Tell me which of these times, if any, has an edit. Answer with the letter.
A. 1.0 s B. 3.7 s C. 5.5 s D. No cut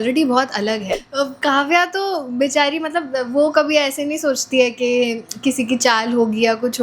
A